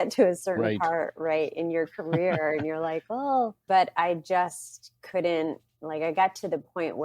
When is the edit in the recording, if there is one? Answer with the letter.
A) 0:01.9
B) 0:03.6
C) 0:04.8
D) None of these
B